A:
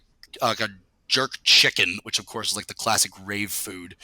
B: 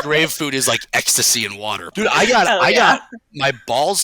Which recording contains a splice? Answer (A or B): B